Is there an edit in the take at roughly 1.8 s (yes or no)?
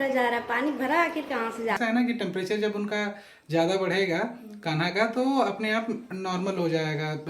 yes